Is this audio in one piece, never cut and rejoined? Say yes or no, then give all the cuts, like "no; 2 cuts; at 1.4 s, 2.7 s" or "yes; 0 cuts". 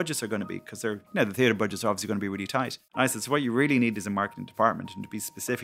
no; 2 cuts; at 1.0 s, 2.8 s